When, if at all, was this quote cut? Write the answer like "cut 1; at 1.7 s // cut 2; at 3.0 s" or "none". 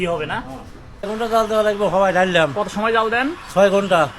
cut 1; at 1.1 s